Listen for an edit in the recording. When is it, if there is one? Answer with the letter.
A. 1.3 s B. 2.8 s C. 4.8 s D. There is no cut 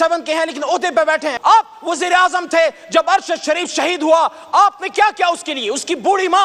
A